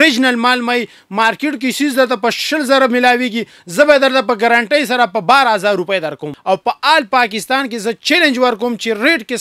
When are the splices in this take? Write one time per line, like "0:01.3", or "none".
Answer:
0:06.3